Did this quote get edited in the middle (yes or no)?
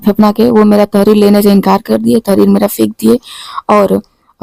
no